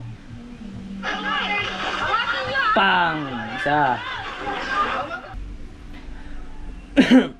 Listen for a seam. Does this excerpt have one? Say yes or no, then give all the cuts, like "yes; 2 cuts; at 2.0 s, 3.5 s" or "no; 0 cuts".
yes; 1 cut; at 5.3 s